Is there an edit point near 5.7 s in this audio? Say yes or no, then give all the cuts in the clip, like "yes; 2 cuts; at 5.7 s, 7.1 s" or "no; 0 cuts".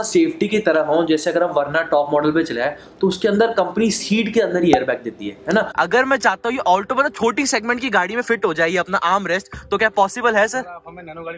yes; 1 cut; at 5.7 s